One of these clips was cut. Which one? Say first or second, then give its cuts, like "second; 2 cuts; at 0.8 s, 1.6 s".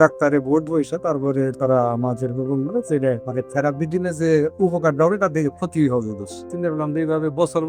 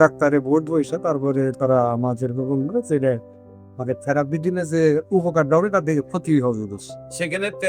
first; 2 cuts; at 3.2 s, 6.5 s